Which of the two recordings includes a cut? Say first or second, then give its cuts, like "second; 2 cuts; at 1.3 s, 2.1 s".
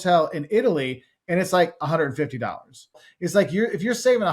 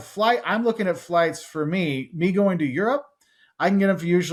first; 1 cut; at 3.1 s